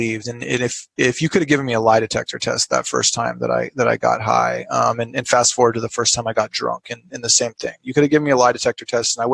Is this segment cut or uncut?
uncut